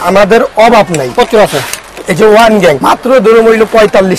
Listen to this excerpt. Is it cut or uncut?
cut